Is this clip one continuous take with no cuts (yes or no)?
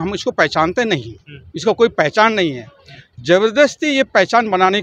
yes